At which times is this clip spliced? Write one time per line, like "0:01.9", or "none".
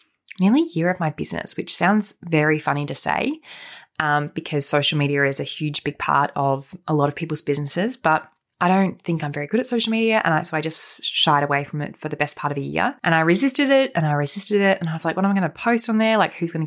0:13.0